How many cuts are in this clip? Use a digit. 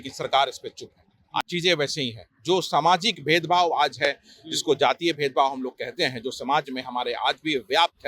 1